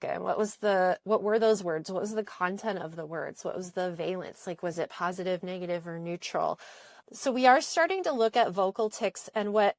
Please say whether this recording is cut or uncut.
uncut